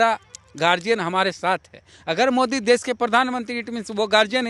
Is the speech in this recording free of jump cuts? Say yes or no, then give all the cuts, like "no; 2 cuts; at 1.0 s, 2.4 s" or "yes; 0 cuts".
yes; 0 cuts